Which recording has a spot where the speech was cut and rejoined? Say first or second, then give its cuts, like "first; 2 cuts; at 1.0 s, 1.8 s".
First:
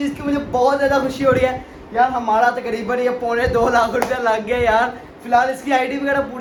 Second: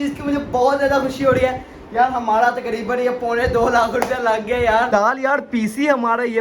second; 1 cut; at 4.9 s